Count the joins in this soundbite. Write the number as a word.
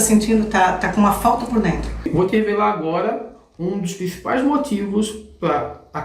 one